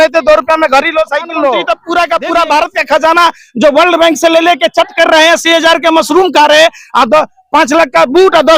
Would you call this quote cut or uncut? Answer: cut